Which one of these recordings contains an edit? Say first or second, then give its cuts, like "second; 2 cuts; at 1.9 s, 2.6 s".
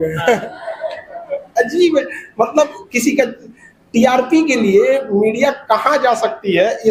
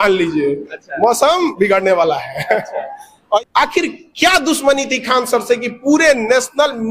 second; 1 cut; at 3.4 s